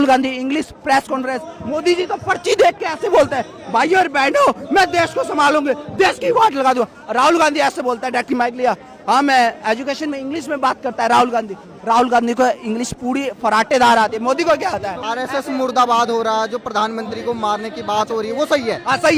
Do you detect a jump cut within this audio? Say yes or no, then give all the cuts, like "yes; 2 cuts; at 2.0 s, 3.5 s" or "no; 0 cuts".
yes; 1 cut; at 15.0 s